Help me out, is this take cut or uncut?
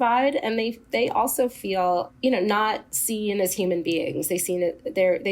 cut